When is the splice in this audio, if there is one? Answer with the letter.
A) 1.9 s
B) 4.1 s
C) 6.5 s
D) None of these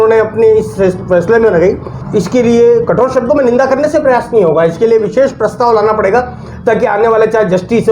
A